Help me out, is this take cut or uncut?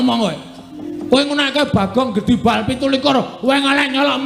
uncut